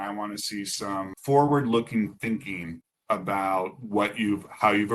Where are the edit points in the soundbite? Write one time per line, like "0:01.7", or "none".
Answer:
0:01.2